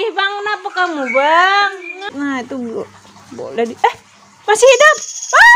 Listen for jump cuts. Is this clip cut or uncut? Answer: cut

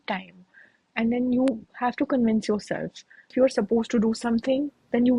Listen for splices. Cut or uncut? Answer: cut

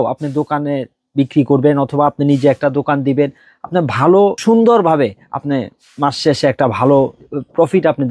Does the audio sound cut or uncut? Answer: cut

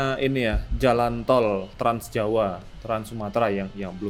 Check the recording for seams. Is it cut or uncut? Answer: uncut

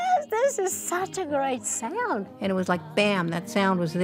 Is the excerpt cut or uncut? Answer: cut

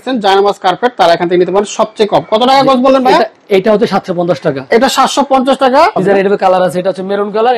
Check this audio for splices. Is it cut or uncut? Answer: cut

